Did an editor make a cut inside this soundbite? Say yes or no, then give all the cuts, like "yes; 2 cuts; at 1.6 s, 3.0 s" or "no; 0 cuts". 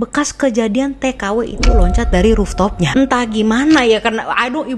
no; 0 cuts